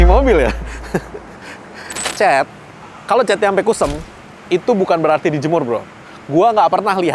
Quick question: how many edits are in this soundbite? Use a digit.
1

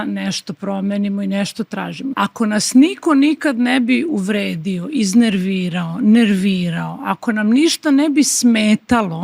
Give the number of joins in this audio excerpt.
1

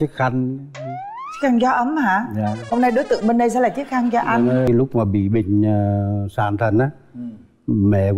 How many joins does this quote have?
1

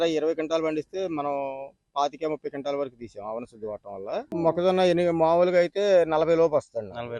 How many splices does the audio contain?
1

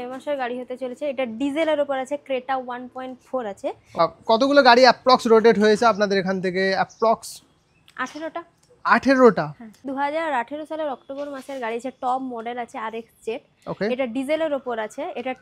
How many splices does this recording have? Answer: 2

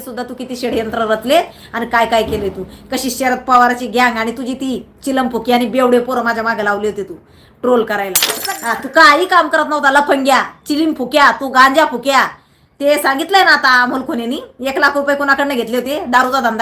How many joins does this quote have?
1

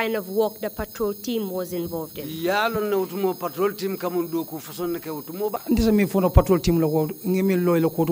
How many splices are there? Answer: 1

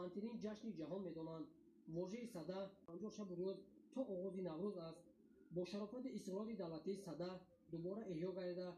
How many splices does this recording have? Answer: 1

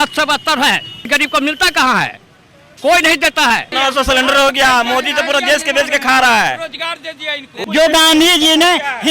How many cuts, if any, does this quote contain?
3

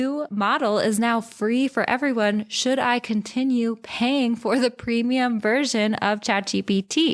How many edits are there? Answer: 0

